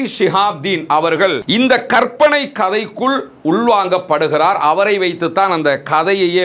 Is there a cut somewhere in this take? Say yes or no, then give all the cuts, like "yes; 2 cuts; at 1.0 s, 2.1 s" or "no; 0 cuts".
no; 0 cuts